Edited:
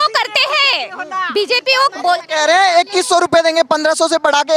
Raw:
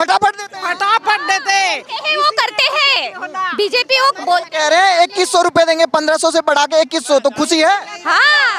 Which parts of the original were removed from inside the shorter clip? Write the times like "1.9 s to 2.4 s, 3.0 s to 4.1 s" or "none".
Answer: none